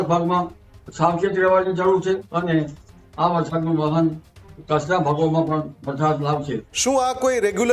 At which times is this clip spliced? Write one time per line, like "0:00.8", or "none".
0:02.3
0:06.6